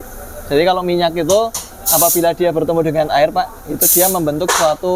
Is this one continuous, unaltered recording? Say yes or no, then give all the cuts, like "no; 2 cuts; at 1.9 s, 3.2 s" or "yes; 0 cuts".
yes; 0 cuts